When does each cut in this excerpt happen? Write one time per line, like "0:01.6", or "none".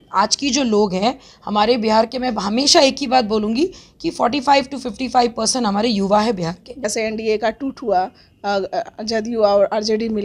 0:06.8

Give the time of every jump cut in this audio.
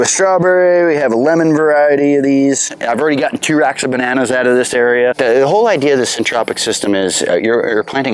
0:02.7
0:05.2

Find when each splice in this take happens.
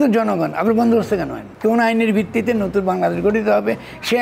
0:01.4

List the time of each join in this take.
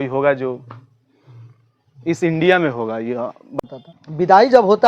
0:03.5

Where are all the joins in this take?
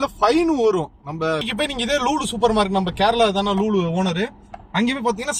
0:01.4

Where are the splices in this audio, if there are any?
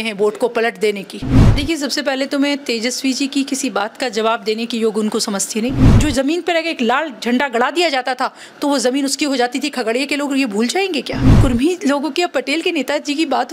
0:01.4
0:05.8
0:11.4

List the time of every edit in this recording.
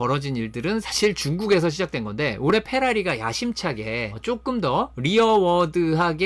0:04.1
0:04.9

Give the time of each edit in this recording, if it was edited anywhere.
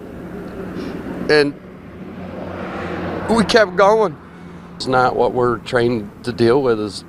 0:04.8

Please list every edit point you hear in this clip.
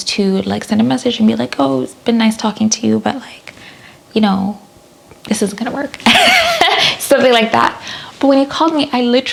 none

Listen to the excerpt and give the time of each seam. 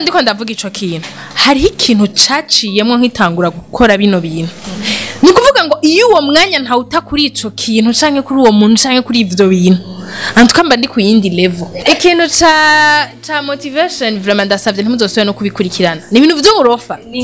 0:11.7

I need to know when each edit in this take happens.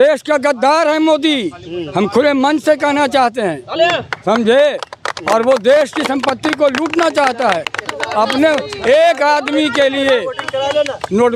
none

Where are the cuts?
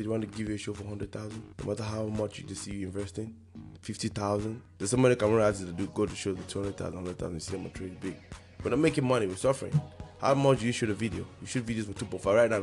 0:01.4
0:04.7

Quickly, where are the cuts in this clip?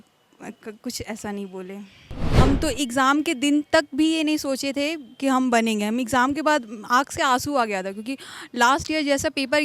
0:02.4

